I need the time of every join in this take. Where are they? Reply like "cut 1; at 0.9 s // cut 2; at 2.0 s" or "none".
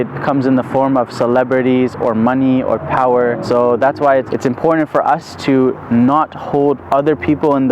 cut 1; at 3.4 s // cut 2; at 4.3 s

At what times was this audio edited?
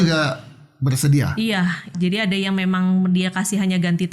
cut 1; at 1.9 s

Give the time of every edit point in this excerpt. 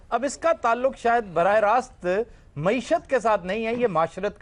none

